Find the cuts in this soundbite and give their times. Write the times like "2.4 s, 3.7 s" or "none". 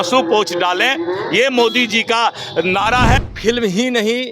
3.3 s